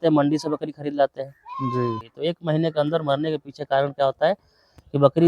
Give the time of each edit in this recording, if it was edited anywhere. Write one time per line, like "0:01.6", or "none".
0:02.0